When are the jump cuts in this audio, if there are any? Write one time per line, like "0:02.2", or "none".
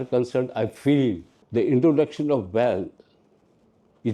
0:01.3